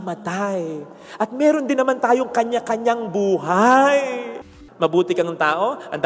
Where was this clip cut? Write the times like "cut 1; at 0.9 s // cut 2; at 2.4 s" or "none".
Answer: cut 1; at 4.3 s